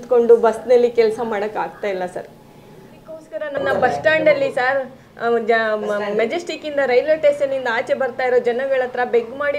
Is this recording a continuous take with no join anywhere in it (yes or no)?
no